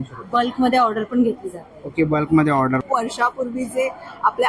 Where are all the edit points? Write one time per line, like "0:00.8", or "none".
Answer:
0:02.8